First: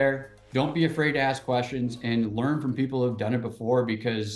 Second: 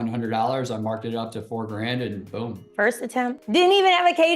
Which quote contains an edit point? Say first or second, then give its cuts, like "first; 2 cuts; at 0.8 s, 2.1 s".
second; 2 cuts; at 2.6 s, 3.4 s